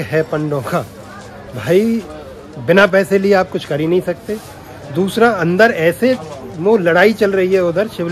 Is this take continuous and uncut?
yes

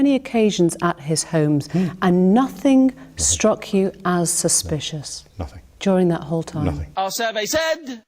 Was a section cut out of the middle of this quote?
yes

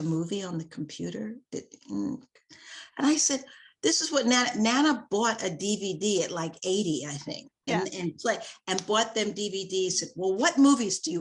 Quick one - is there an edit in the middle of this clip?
yes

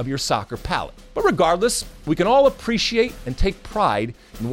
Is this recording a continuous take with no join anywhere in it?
no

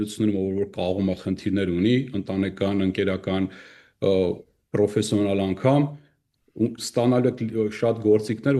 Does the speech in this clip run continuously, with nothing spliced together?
yes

